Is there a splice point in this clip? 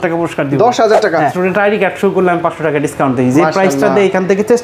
yes; 1 cut; at 1.4 s

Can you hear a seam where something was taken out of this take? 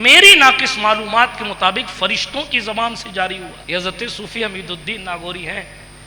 yes; 1 cut; at 3.6 s

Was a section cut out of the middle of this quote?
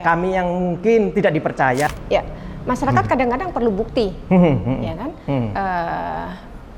yes; 1 cut; at 1.9 s

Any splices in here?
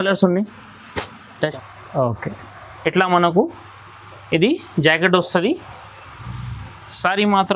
yes; 1 cut; at 1.5 s

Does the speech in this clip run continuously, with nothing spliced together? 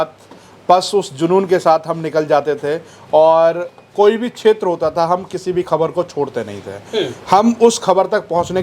yes; 0 cuts

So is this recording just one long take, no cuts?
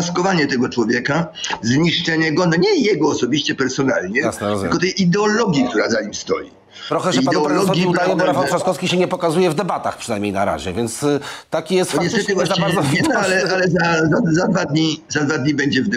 yes; 0 cuts

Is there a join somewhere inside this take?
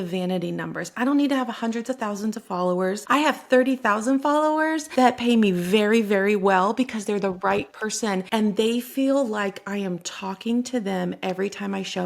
yes; 3 cuts; at 3.0 s, 4.8 s, 8.2 s

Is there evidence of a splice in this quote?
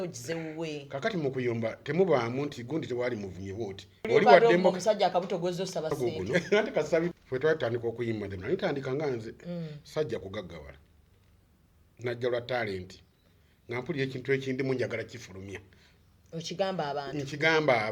yes; 2 cuts; at 4.1 s, 7.1 s

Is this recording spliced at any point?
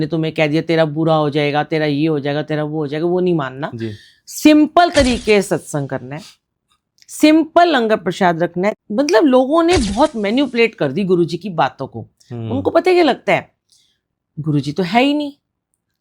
yes; 1 cut; at 8.8 s

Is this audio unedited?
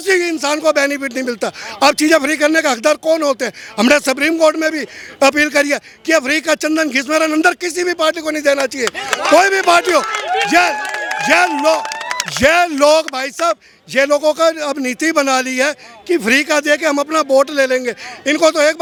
yes; 0 cuts

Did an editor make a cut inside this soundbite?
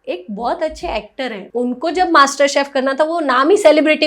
yes; 1 cut; at 1.4 s

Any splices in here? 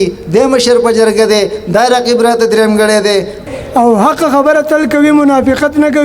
yes; 1 cut; at 3.4 s

